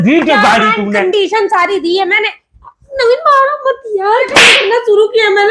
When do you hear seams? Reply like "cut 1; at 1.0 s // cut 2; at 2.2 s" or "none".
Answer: cut 1; at 4.3 s